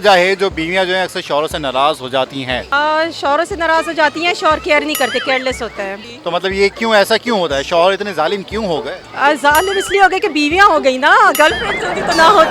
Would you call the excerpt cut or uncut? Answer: cut